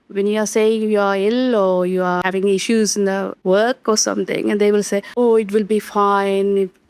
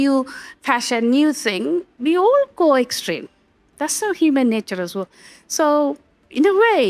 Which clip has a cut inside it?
first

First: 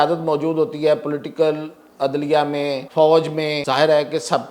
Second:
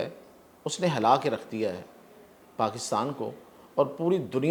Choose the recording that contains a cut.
first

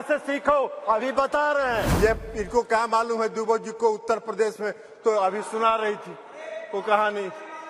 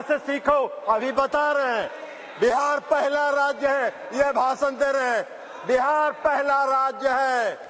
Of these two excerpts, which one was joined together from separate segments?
first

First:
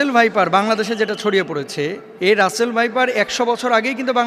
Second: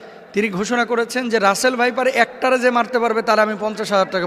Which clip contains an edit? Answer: first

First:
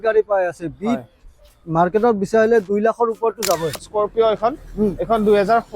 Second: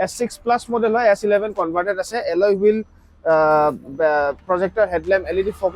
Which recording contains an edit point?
first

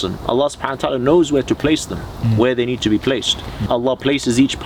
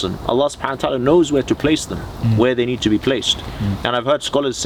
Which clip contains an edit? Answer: first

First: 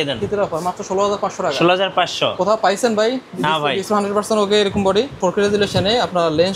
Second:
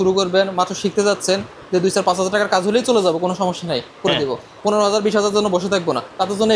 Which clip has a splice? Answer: first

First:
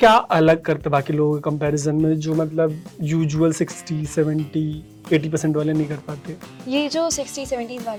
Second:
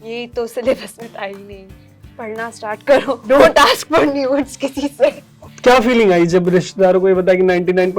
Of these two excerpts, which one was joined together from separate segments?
second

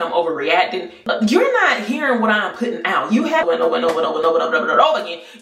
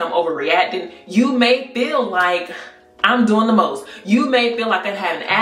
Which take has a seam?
first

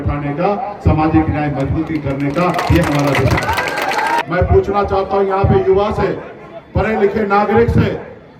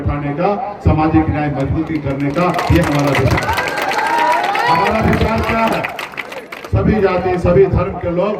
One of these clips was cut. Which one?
first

